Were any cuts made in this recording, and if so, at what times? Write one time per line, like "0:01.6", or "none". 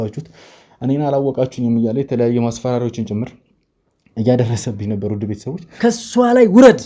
0:05.7